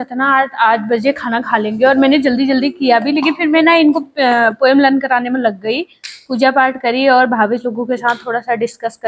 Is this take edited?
no; 0 cuts

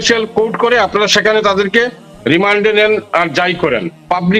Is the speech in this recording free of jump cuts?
yes; 0 cuts

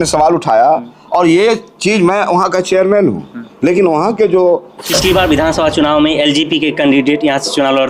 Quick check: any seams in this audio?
yes; 1 cut; at 4.8 s

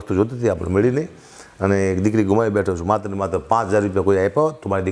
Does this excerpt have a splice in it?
no; 0 cuts

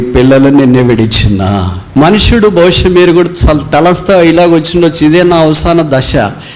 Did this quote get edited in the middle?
yes; 1 cut; at 1.8 s

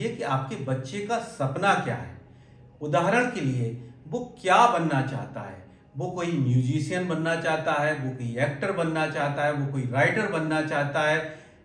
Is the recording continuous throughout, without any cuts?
yes; 0 cuts

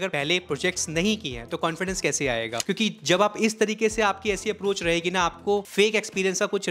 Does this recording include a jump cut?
yes; 2 cuts; at 2.5 s, 5.7 s

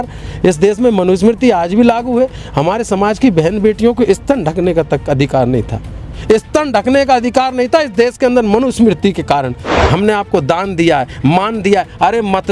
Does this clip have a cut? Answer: yes; 1 cut; at 9.7 s

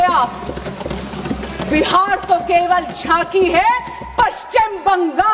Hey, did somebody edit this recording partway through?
no; 0 cuts

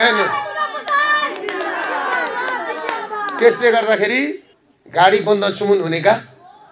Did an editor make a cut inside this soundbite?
yes; 1 cut; at 4.5 s

